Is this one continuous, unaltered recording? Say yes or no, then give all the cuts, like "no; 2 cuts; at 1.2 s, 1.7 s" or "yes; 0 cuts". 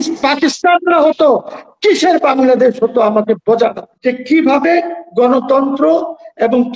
no; 1 cut; at 3.9 s